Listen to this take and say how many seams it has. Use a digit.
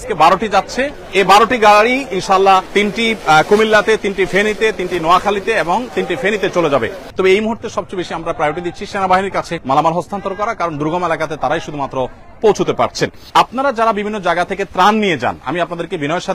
5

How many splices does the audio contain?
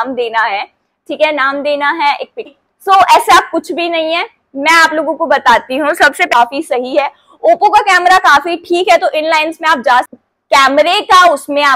3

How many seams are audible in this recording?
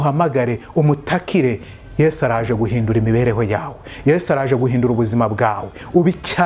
0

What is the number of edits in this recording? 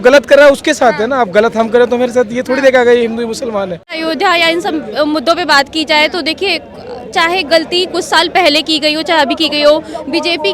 1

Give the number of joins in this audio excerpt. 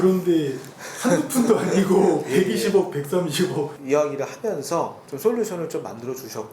1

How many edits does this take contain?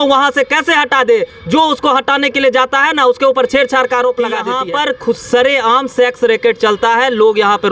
1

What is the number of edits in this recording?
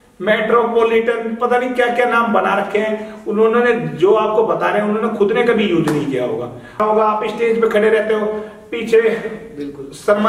1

